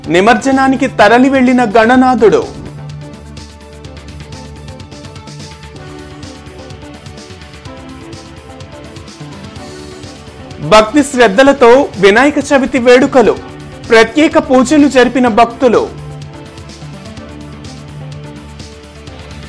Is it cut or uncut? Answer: uncut